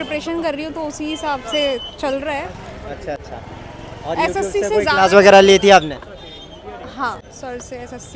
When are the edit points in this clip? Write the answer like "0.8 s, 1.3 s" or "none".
none